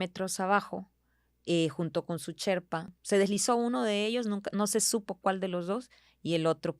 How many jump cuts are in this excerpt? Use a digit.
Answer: 1